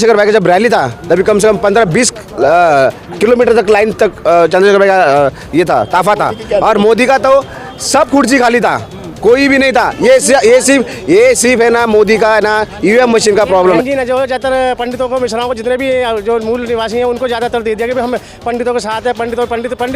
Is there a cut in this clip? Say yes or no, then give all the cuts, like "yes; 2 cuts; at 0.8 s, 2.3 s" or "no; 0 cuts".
yes; 1 cut; at 13.8 s